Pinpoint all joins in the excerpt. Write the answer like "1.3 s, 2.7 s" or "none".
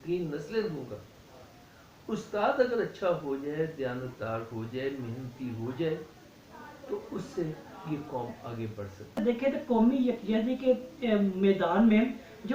9.2 s